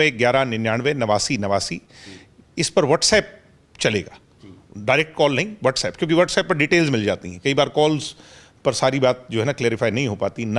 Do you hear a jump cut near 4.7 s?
no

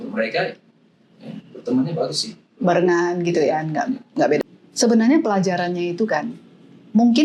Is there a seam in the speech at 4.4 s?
yes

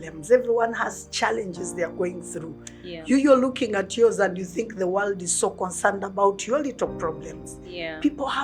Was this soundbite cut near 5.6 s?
no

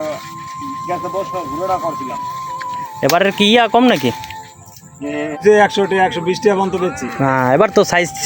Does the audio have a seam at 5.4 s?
yes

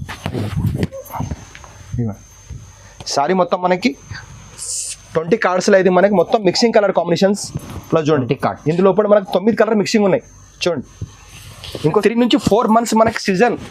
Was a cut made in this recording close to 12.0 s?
yes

